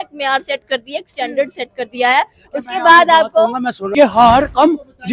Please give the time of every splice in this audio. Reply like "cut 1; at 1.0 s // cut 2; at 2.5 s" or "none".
cut 1; at 3.9 s